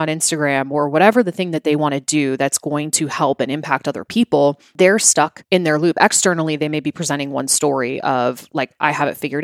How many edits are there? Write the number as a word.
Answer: one